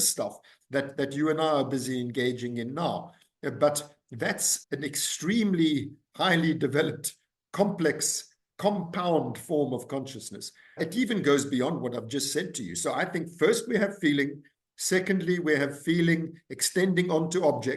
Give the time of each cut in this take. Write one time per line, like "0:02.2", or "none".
0:04.5
0:10.8

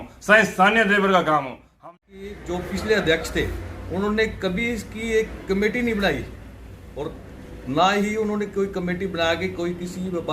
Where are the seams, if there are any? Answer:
0:01.6

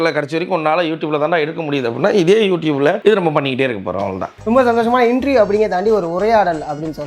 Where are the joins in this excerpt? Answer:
0:03.0
0:04.3

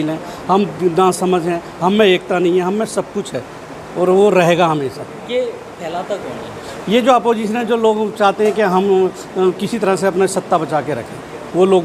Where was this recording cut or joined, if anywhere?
none

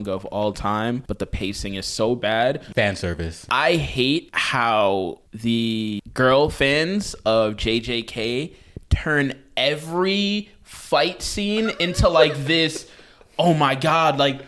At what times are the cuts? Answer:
0:01.1
0:02.9
0:04.4
0:05.3
0:06.0

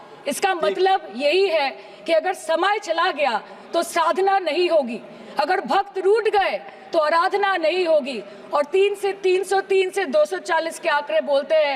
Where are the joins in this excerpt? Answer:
none

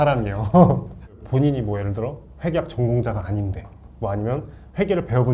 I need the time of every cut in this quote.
0:01.2

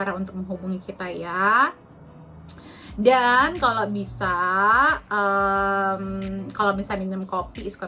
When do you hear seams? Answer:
none

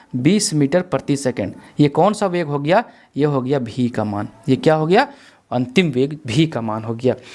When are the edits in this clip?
none

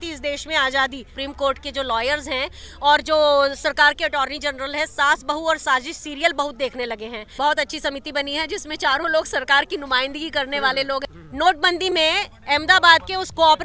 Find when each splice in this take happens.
0:01.1
0:07.3
0:11.1

